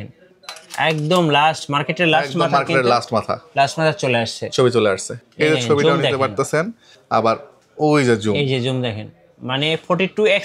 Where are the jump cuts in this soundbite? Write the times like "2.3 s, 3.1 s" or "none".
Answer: 5.2 s